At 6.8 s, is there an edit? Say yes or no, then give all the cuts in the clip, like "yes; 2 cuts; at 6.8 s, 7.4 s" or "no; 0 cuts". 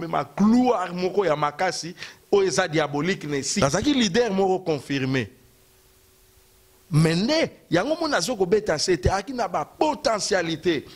no; 1 cut; at 3.5 s